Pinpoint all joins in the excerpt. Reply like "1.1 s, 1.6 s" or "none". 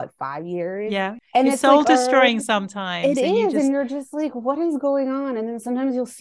1.2 s